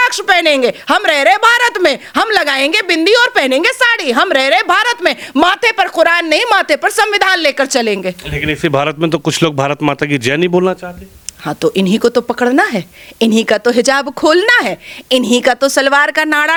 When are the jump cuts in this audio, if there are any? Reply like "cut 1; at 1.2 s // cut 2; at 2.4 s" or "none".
none